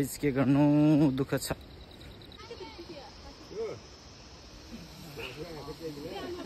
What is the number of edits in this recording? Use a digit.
1